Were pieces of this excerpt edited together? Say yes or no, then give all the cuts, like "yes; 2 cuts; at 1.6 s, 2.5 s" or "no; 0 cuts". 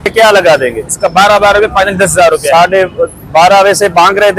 no; 0 cuts